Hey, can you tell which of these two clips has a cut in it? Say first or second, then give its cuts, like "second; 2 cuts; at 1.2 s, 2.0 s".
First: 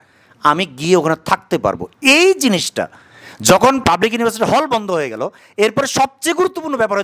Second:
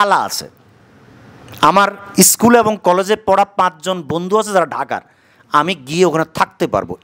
first; 1 cut; at 3.8 s